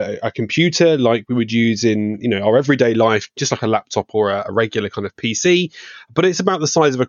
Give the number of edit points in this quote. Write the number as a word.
zero